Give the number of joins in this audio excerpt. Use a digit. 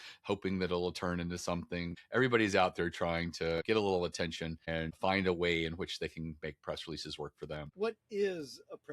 4